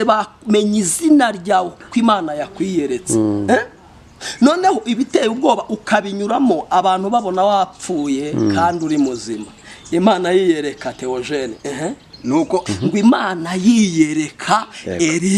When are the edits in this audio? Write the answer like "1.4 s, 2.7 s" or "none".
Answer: 12.6 s